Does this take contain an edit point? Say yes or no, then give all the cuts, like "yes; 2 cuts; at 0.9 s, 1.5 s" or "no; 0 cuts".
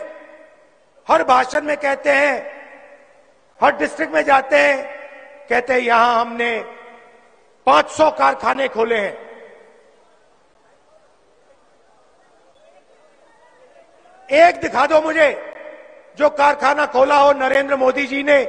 no; 0 cuts